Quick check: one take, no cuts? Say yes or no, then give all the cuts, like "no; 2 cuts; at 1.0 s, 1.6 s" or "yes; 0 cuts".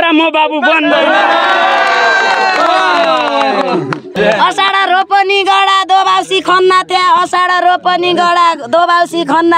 no; 1 cut; at 4.2 s